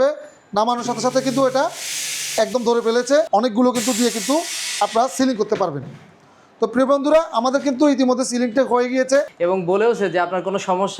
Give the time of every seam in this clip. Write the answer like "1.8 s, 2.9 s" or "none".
3.3 s, 9.3 s